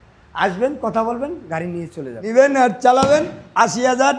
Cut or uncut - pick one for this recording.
cut